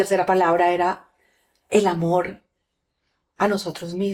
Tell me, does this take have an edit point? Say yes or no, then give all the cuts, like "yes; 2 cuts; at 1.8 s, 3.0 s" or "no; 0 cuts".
no; 0 cuts